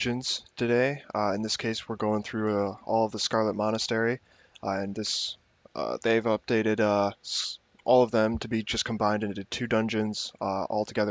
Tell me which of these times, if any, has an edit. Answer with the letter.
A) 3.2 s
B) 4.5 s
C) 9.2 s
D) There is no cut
C